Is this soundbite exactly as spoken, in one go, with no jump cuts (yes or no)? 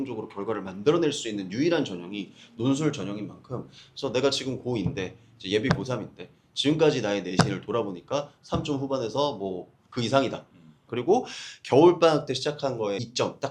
no